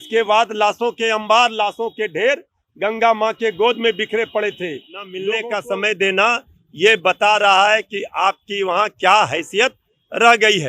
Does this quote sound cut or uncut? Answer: cut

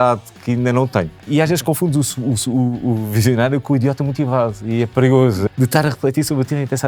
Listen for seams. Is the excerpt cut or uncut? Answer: cut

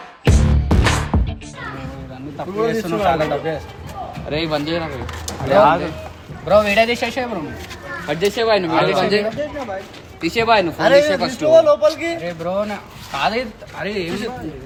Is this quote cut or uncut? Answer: uncut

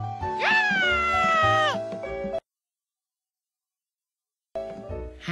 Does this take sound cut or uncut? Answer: uncut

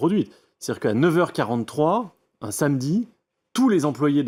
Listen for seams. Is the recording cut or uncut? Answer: uncut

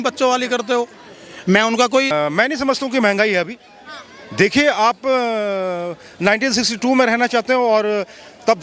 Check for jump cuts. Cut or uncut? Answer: cut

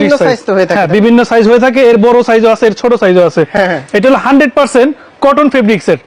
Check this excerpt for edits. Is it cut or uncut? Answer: uncut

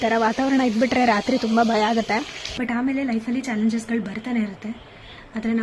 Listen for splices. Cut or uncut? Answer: cut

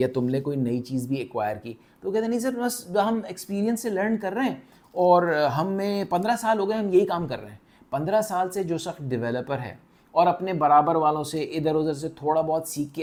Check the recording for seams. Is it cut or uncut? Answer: uncut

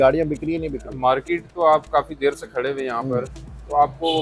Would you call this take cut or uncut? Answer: uncut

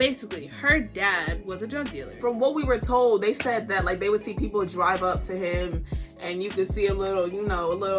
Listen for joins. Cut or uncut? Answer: cut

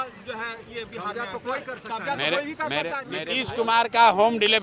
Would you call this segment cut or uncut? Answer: cut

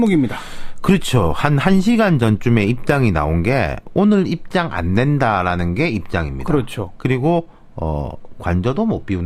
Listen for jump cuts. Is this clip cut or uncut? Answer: cut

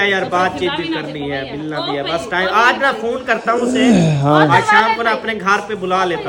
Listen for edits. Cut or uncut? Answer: uncut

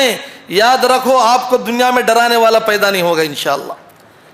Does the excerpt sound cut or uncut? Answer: uncut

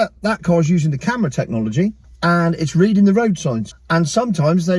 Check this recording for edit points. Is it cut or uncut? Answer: cut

